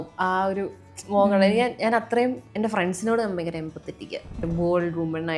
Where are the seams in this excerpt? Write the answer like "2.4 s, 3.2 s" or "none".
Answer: 2.4 s, 4.3 s